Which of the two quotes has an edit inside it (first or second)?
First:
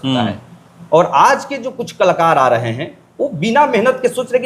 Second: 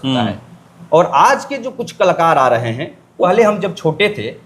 second